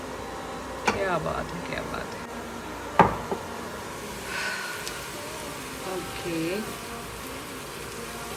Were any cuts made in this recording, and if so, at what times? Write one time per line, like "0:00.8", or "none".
none